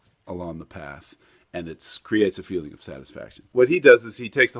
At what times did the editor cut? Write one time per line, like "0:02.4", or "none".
0:03.4